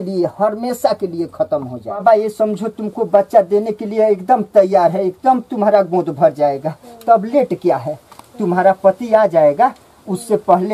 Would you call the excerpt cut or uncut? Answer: cut